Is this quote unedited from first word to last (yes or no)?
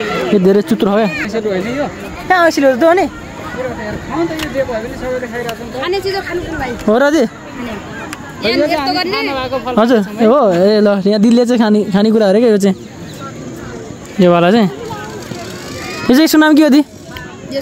no